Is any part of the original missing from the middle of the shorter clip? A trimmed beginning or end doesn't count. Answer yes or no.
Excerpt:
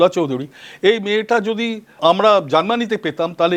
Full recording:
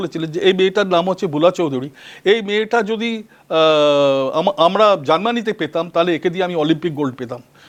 yes